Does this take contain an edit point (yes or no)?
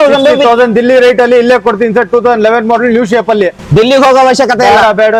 no